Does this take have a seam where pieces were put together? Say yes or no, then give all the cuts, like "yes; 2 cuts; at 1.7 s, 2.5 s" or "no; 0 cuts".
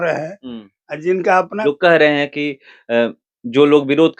yes; 1 cut; at 1.6 s